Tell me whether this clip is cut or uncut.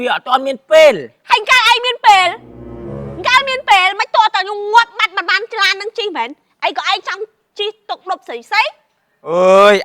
uncut